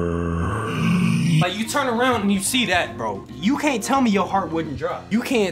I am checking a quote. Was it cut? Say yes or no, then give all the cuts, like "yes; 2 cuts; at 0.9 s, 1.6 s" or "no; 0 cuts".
no; 0 cuts